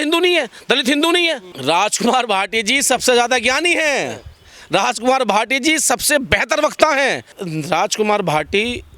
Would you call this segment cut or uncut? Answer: cut